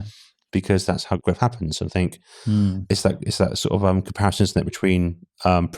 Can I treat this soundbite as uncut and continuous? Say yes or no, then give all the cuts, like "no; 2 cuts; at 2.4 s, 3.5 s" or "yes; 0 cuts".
no; 1 cut; at 1.2 s